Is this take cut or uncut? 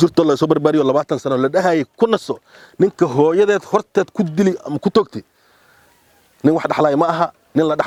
uncut